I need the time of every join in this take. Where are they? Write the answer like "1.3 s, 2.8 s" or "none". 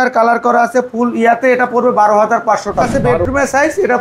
2.9 s